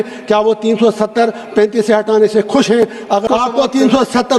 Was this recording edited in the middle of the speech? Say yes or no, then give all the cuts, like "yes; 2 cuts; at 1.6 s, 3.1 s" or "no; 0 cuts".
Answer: yes; 1 cut; at 3.2 s